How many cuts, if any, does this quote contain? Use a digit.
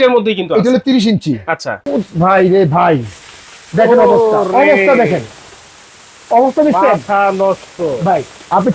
1